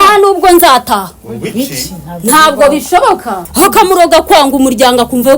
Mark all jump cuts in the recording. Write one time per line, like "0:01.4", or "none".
0:03.4